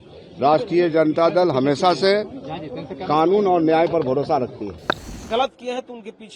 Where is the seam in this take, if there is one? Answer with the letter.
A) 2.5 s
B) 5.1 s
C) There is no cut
B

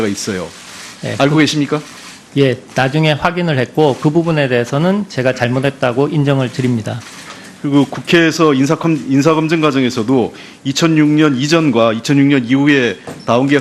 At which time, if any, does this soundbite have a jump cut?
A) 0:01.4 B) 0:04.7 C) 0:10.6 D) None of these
B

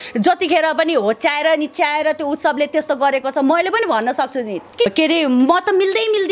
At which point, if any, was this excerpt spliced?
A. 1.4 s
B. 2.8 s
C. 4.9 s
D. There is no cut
C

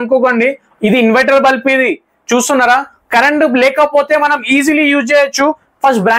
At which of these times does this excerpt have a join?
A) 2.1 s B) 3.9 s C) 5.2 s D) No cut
D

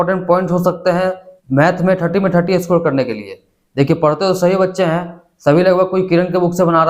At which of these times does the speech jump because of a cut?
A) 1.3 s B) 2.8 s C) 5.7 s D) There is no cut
A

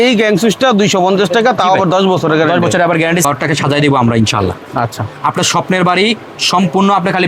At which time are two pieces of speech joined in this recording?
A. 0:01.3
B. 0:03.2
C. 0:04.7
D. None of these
B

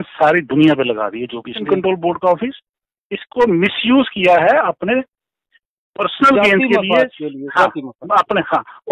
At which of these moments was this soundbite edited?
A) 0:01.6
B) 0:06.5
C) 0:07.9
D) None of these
A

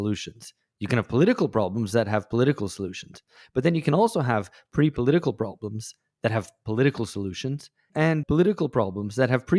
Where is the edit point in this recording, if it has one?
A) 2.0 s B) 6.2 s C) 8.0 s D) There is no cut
C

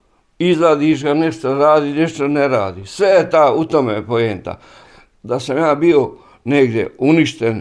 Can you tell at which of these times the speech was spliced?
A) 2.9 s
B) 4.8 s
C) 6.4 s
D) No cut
B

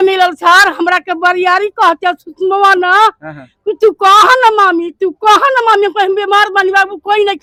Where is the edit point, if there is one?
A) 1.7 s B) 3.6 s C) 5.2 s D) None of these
D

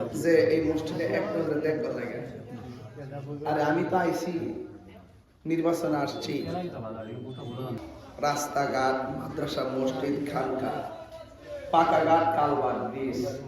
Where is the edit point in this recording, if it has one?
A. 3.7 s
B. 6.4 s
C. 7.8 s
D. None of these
C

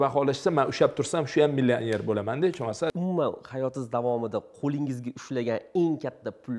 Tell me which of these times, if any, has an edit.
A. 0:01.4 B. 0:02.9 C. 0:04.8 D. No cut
B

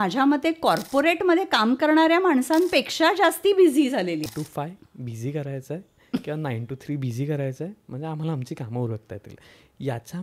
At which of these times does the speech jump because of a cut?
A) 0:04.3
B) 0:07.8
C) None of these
A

